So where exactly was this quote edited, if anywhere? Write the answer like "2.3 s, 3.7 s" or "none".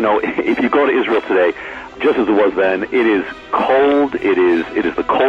1.9 s